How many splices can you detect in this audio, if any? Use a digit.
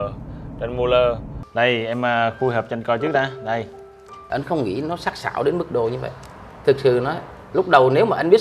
2